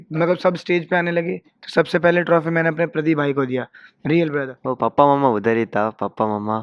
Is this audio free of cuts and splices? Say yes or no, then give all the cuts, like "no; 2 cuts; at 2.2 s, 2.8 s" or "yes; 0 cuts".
no; 1 cut; at 4.5 s